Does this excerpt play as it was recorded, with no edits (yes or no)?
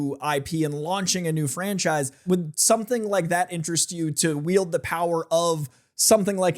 no